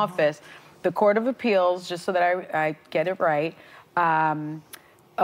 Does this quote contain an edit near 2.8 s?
yes; 1 cut; at 2.8 s

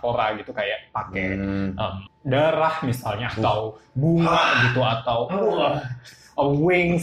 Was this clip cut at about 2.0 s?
yes; 1 cut; at 2.0 s

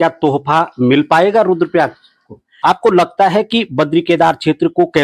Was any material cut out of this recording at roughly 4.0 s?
no; 1 cut; at 2.5 s

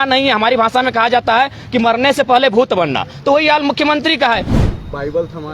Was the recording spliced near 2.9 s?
no; 1 cut; at 4.5 s

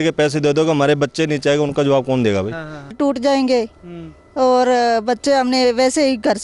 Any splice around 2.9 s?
yes; 1 cut; at 2.9 s

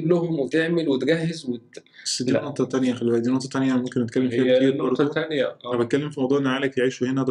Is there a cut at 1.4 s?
no; 0 cuts

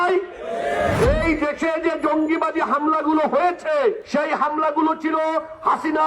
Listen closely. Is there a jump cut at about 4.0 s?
yes; 2 cuts; at 0.9 s, 4.0 s

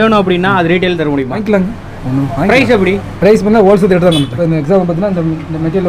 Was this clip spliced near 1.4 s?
yes; 2 cuts; at 1.4 s, 4.3 s

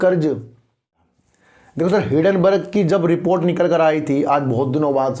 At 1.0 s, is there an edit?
yes; 1 cut; at 1.0 s

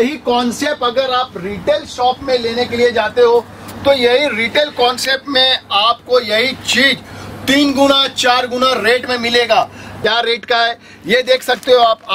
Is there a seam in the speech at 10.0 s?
yes; 1 cut; at 10.0 s

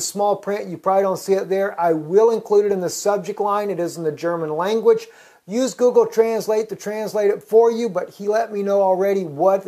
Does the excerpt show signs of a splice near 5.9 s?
yes; 1 cut; at 5.9 s

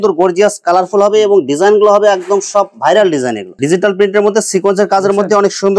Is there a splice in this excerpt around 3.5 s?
yes; 1 cut; at 3.5 s

